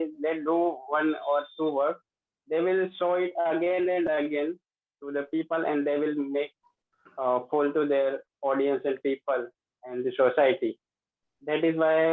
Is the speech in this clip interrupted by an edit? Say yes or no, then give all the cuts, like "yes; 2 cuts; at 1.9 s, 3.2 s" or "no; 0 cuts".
no; 0 cuts